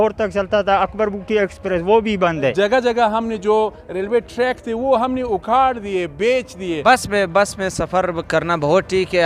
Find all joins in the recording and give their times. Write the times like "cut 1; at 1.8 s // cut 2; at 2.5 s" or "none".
cut 1; at 2.5 s // cut 2; at 6.8 s